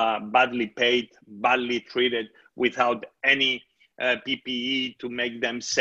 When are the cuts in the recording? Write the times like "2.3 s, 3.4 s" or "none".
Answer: none

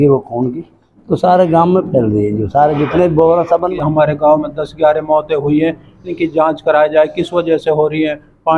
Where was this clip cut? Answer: 3.7 s

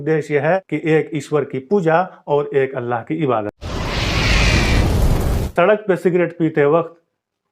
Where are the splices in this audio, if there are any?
3.6 s, 5.5 s

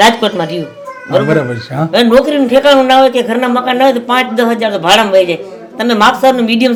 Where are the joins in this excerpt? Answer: none

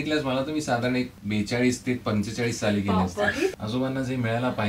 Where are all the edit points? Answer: 1.2 s, 3.6 s

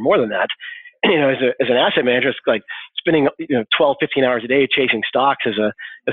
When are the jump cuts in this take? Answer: 0.9 s

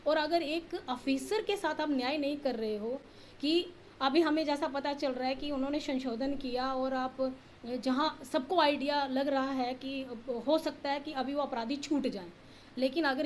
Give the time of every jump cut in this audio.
none

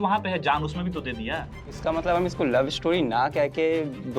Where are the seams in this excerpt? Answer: 1.8 s

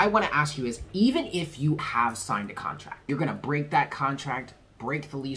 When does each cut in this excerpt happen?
1.8 s, 3.0 s

